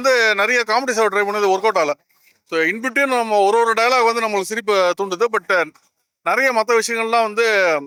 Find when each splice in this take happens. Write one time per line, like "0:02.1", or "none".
none